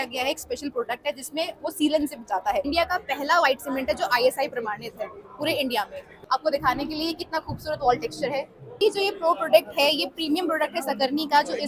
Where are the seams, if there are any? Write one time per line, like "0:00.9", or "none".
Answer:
0:02.7
0:06.0
0:08.8